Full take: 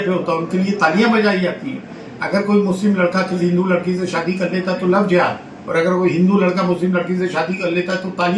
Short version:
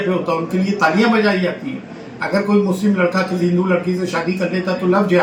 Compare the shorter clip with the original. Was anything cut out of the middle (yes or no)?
no